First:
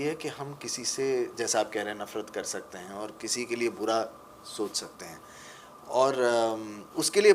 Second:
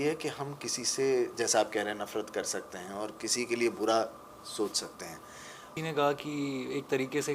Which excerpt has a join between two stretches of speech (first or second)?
second